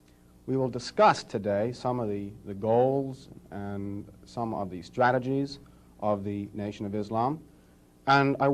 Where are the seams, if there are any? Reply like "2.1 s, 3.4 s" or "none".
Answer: 1.9 s